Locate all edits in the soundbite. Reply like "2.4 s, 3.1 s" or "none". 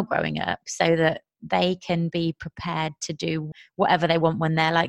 3.5 s